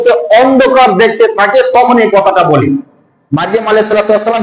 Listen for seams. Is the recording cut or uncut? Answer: uncut